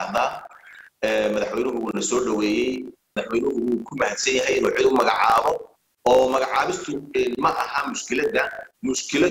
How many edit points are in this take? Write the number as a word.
one